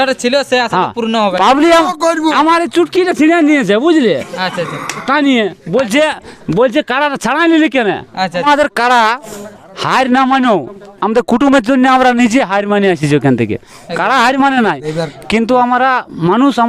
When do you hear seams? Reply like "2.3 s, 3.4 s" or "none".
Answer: 8.4 s